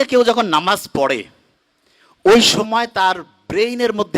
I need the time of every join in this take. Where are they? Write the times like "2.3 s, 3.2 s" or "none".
none